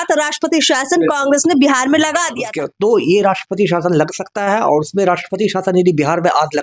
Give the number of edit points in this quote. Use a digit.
1